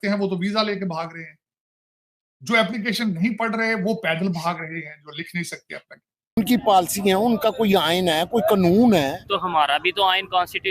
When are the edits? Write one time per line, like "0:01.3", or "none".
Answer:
0:06.4